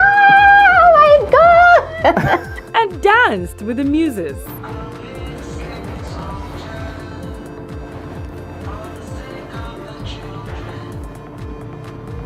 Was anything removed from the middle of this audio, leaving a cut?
no; 0 cuts

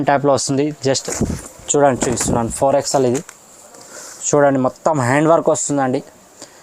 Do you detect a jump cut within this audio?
yes; 1 cut; at 1.0 s

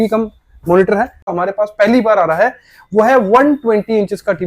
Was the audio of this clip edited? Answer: yes; 1 cut; at 1.3 s

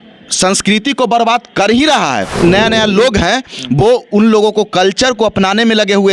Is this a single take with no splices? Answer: no; 1 cut; at 2.3 s

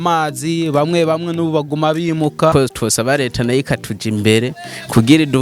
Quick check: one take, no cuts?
no; 1 cut; at 2.5 s

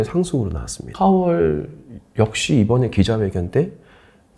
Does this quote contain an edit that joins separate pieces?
yes; 1 cut; at 0.9 s

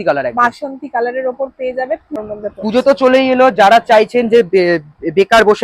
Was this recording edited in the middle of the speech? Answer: yes; 1 cut; at 2.2 s

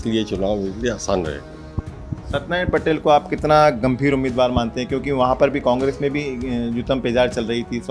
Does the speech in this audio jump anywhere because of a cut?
no; 0 cuts

